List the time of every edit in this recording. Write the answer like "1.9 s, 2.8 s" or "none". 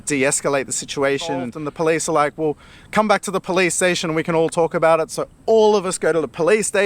1.6 s